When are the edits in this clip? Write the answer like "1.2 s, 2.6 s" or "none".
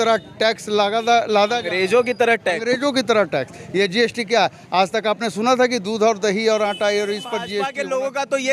7.6 s